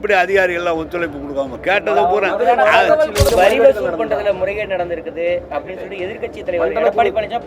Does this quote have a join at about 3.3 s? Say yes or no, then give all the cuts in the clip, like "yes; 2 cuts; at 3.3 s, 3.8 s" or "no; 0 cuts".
yes; 1 cut; at 3.3 s